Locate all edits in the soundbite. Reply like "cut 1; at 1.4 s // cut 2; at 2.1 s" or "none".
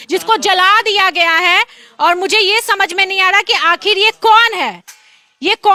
none